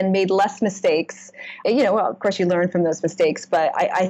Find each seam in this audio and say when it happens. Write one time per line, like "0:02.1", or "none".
0:01.5

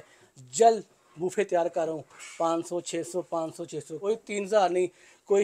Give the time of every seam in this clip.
0:04.0

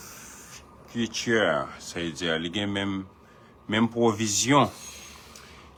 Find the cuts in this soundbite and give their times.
none

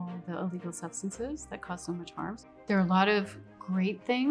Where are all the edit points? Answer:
0:02.5

